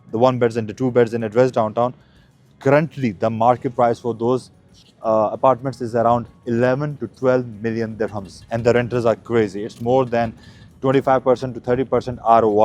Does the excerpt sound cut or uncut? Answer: uncut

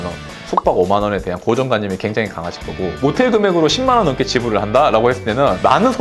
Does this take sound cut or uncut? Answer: uncut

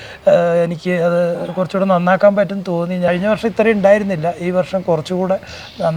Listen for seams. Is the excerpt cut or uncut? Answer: cut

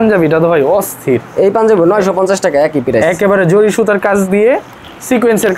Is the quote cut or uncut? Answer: uncut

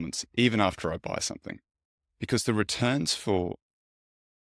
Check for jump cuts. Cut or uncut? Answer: uncut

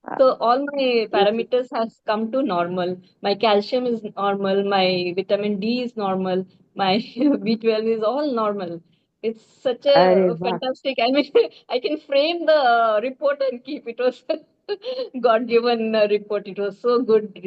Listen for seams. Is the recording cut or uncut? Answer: uncut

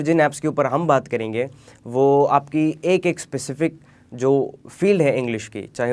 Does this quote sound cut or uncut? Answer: uncut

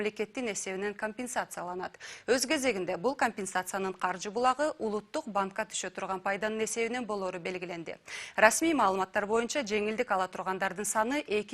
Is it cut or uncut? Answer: cut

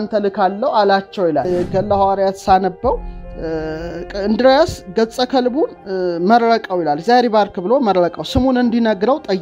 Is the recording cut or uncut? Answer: cut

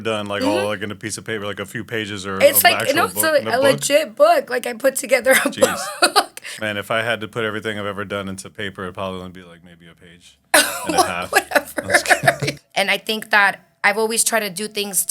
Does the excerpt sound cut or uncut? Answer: cut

